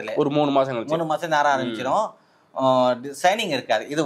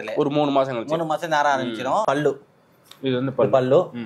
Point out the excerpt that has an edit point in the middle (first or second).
second